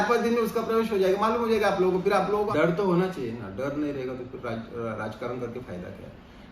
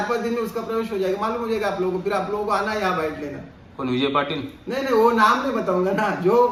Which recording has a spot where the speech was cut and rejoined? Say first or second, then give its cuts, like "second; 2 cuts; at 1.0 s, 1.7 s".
first; 1 cut; at 2.5 s